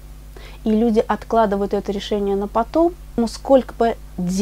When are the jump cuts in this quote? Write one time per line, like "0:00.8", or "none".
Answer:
0:03.2